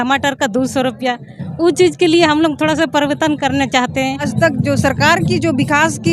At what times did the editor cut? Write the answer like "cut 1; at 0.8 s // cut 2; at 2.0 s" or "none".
cut 1; at 4.2 s